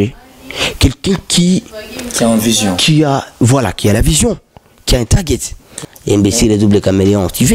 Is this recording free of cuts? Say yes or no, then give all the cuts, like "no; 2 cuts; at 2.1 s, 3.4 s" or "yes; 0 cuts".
no; 1 cut; at 5.7 s